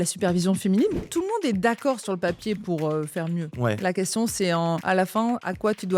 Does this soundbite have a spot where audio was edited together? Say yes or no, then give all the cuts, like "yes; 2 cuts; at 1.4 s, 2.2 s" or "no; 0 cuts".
yes; 3 cuts; at 1.1 s, 3.5 s, 5.2 s